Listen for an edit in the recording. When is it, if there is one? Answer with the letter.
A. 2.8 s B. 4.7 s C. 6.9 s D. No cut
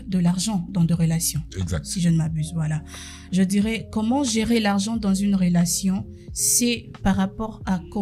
D